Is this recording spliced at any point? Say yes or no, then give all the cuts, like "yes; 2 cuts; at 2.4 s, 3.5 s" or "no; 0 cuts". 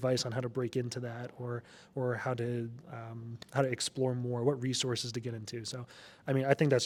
no; 0 cuts